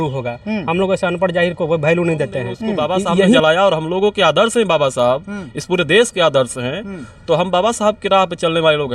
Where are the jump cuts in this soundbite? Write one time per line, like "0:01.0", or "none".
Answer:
0:03.4